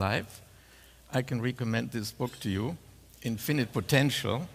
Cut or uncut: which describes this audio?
cut